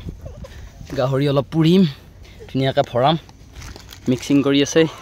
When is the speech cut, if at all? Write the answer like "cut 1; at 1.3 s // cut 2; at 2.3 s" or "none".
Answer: none